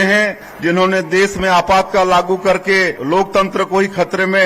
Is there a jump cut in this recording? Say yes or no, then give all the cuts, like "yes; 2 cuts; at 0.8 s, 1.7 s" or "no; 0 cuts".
yes; 1 cut; at 3.0 s